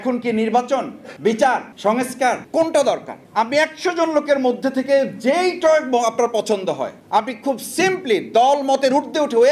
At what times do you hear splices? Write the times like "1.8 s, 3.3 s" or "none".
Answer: 1.0 s, 2.1 s, 3.2 s, 7.0 s